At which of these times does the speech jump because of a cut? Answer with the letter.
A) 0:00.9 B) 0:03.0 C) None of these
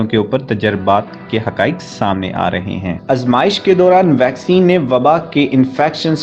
B